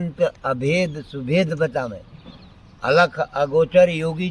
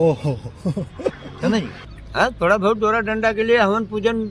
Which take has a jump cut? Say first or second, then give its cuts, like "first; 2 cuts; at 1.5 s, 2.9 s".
second; 1 cut; at 1.8 s